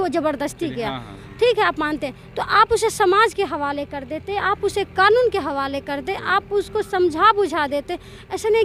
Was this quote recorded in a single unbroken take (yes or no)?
yes